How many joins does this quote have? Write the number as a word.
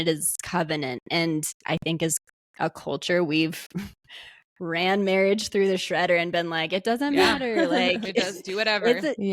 zero